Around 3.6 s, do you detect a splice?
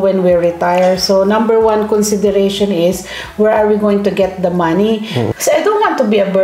no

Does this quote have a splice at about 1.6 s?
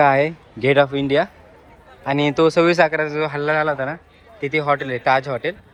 no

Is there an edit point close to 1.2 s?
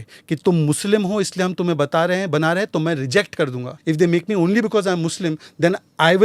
no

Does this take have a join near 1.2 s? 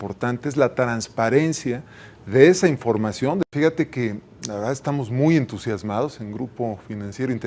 no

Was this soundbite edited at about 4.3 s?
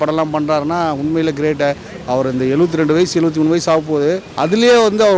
yes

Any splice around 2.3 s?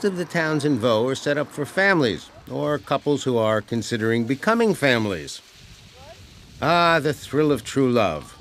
no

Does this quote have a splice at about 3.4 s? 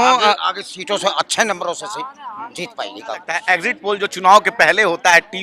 yes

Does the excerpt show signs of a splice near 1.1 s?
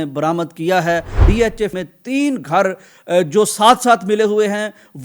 yes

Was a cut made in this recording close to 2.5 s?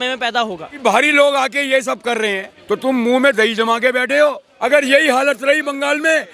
yes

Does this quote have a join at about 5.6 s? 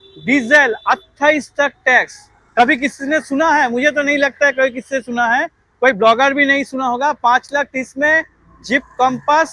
no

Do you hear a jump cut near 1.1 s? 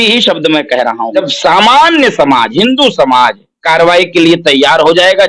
yes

